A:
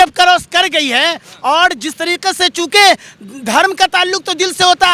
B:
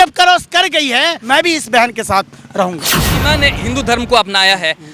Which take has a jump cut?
B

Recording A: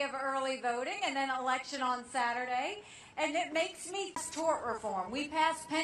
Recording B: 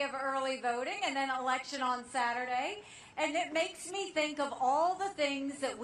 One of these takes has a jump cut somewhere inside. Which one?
B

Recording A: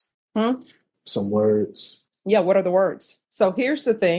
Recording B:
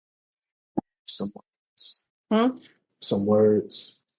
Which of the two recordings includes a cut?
A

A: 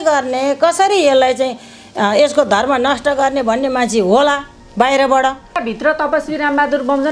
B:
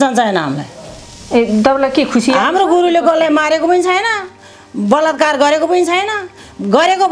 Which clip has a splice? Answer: A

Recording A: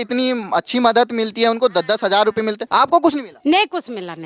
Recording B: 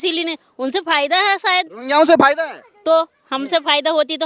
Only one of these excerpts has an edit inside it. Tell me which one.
A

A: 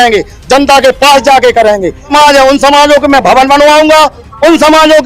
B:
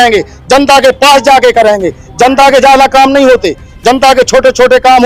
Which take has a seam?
A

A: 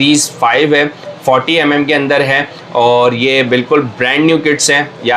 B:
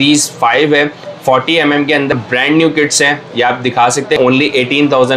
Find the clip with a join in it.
B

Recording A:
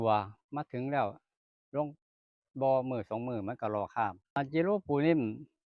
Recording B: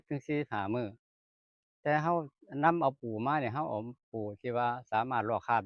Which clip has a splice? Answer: A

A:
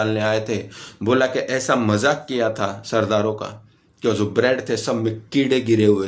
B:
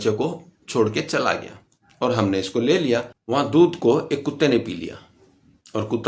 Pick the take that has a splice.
B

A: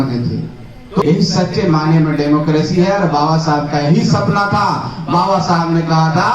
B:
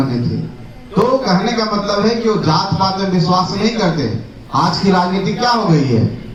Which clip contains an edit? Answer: A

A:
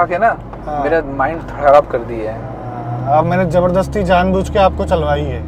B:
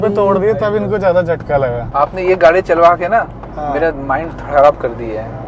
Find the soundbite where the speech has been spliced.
B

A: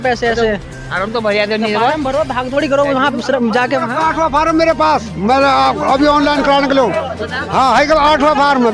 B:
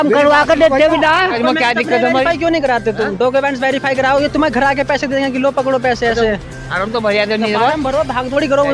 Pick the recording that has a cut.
B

